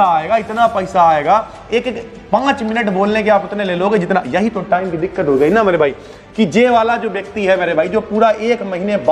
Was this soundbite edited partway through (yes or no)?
no